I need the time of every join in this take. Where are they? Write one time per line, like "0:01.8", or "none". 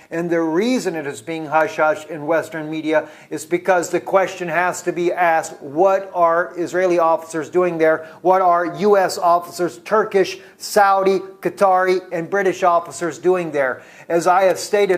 0:07.4